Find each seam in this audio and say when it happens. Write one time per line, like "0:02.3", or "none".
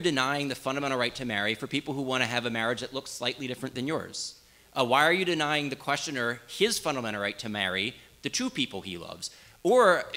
none